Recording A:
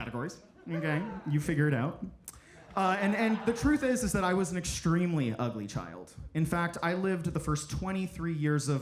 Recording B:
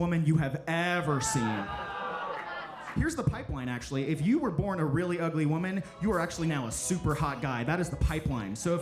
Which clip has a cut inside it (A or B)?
B